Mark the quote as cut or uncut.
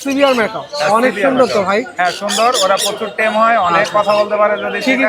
uncut